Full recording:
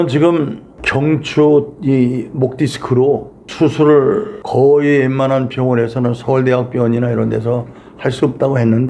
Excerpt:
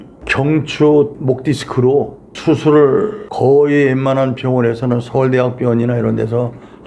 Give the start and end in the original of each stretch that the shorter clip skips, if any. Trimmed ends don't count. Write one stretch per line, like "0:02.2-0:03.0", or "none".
0:01.7-0:02.3